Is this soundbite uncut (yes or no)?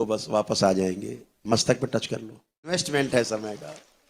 no